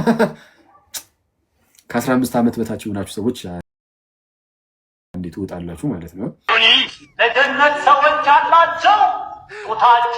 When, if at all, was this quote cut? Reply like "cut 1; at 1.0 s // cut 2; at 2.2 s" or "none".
cut 1; at 6.5 s